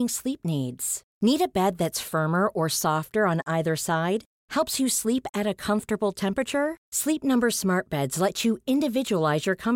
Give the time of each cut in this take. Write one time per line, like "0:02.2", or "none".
none